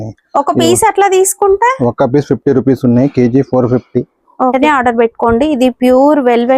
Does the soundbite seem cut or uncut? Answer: cut